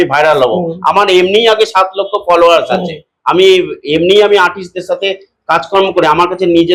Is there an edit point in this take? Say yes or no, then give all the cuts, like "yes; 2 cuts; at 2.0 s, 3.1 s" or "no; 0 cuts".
no; 0 cuts